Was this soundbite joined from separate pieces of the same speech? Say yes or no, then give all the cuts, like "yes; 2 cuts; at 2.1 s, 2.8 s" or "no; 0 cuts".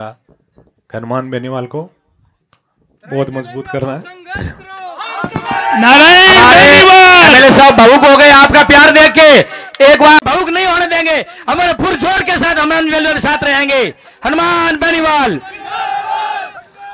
no; 0 cuts